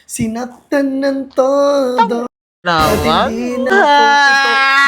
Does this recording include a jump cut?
yes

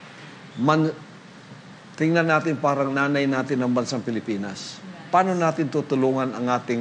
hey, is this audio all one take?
yes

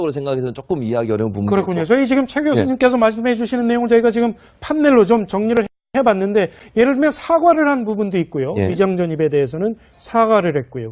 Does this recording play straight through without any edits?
no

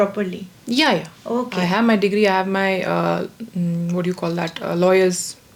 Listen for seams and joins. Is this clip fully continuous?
yes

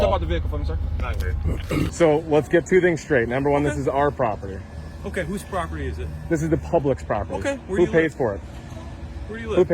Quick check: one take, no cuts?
no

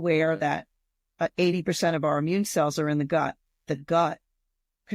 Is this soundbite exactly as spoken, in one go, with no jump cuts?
no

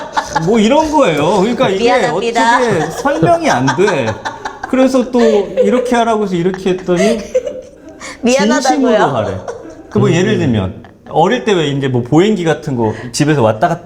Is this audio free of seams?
yes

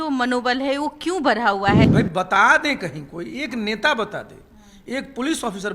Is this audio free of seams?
no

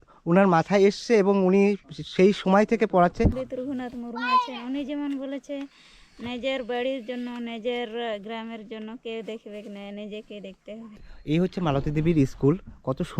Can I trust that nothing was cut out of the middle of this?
no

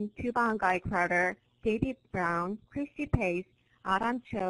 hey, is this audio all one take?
yes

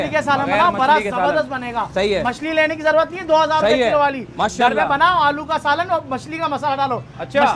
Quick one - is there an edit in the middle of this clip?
no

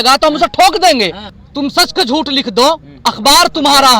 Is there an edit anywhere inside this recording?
yes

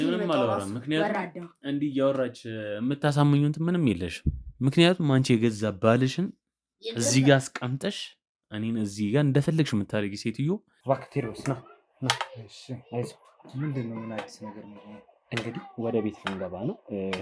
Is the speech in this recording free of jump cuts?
no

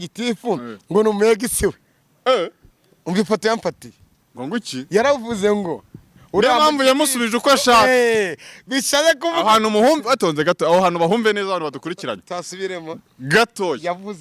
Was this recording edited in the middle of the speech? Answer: no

